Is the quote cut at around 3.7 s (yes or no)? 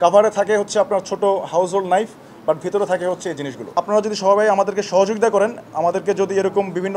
yes